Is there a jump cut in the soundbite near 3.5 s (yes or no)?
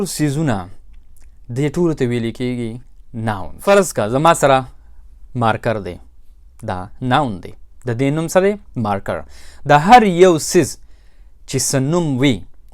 yes